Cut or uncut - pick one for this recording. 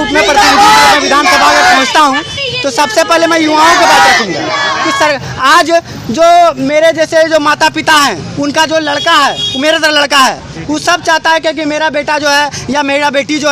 uncut